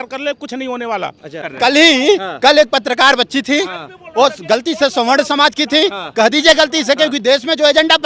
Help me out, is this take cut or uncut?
cut